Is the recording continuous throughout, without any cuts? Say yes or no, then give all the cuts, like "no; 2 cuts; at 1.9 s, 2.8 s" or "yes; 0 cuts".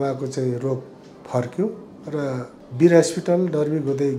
no; 1 cut; at 2.6 s